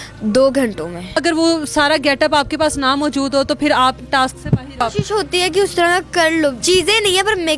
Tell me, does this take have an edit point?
yes; 3 cuts; at 1.2 s, 4.8 s, 6.6 s

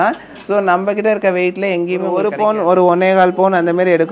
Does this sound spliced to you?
yes; 1 cut; at 2.2 s

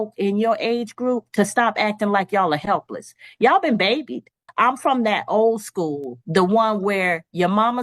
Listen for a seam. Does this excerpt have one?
yes; 1 cut; at 4.4 s

